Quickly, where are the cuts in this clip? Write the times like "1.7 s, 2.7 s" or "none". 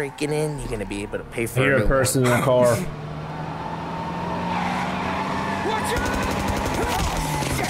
none

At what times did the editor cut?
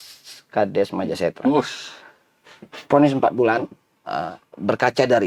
none

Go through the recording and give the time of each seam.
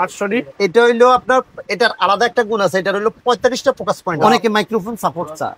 4.2 s

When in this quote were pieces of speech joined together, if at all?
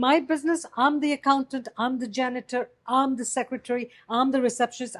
none

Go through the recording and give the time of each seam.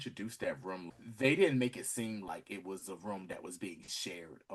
0.9 s

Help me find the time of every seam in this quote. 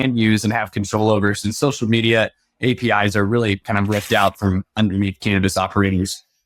none

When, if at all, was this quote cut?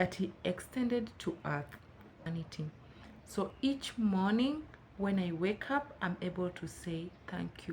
2.3 s

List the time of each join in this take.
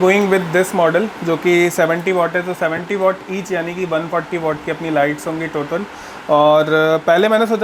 none

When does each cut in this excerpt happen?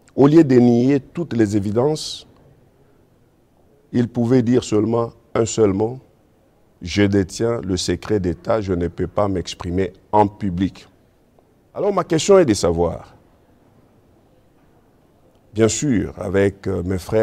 11.8 s

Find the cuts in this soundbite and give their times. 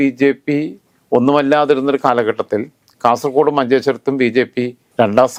none

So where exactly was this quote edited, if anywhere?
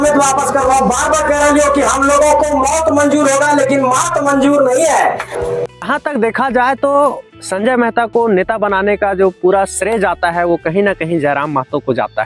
5.8 s

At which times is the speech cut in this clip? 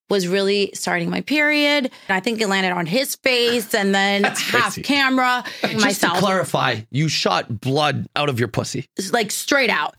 2.1 s, 5.7 s

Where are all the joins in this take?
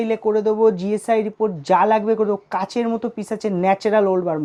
none

